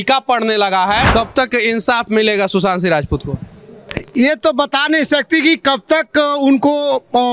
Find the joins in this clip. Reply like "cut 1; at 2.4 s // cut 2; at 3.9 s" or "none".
cut 1; at 1.1 s